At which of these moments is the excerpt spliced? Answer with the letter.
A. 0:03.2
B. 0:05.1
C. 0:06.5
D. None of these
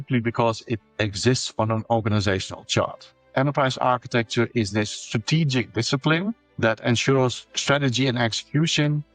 A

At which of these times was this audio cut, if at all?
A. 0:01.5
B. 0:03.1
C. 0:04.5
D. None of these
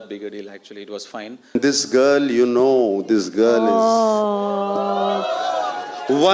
A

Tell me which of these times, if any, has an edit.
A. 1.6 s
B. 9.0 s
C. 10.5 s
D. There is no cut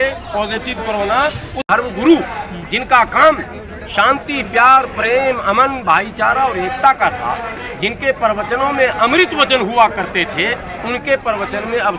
A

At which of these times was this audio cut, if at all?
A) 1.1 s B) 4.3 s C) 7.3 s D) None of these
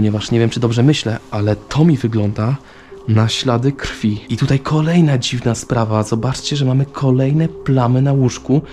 B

